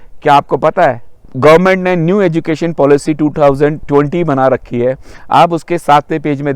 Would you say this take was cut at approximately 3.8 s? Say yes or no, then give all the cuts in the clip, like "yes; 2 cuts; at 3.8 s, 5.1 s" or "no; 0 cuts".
yes; 2 cuts; at 1.2 s, 3.8 s